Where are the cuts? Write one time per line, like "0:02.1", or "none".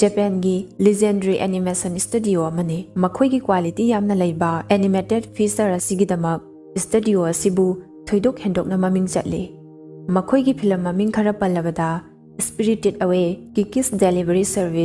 none